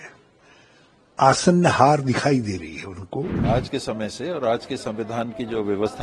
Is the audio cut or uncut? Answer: cut